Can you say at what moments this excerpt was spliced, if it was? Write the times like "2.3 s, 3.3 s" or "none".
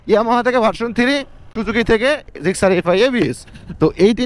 1.6 s